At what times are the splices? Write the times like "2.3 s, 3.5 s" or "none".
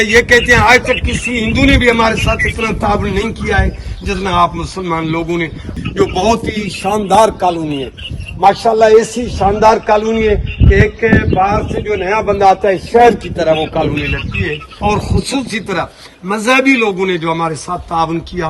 5.7 s, 14.7 s